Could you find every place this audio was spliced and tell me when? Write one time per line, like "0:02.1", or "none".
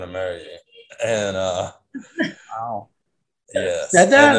none